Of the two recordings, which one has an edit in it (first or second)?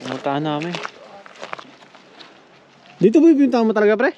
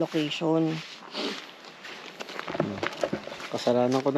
first